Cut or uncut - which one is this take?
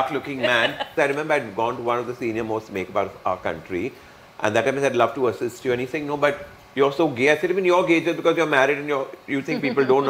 cut